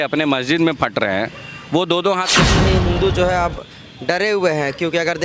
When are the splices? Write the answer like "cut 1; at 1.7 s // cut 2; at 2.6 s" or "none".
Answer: cut 1; at 2.5 s

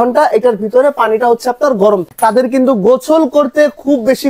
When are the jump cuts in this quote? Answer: cut 1; at 2.1 s

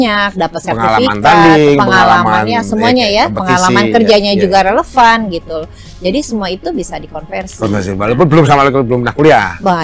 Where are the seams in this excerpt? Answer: none

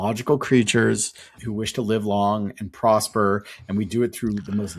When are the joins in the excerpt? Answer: cut 1; at 1.4 s

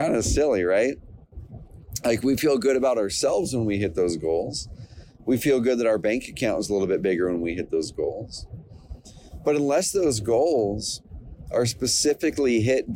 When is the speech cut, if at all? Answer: none

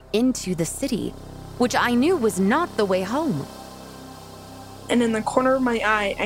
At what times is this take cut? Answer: cut 1; at 4.1 s

